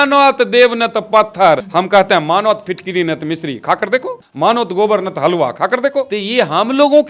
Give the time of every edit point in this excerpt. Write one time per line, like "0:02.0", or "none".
0:01.7
0:04.2
0:06.2